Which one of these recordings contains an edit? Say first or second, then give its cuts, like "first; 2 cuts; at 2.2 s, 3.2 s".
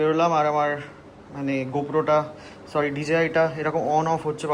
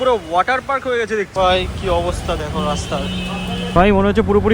second; 2 cuts; at 1.3 s, 3.7 s